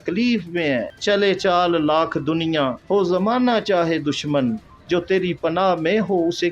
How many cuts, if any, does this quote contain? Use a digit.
1